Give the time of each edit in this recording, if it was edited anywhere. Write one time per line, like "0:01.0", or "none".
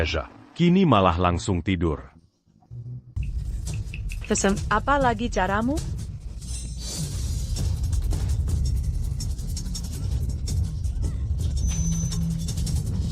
0:03.2